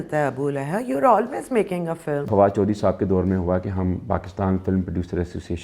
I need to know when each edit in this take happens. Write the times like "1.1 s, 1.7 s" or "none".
2.2 s